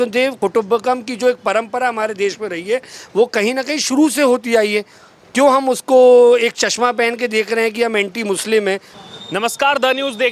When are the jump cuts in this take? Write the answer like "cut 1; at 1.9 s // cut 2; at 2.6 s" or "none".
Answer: cut 1; at 9.0 s